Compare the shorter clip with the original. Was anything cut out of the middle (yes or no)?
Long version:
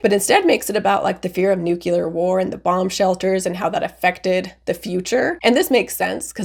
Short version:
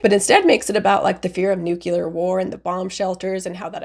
no